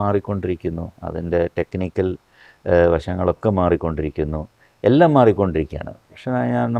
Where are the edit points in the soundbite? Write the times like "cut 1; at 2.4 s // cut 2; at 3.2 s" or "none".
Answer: none